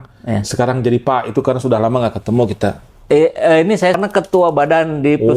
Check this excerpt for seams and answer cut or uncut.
cut